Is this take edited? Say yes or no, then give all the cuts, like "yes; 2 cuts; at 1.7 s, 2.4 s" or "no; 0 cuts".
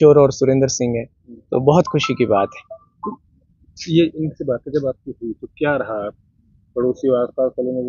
no; 0 cuts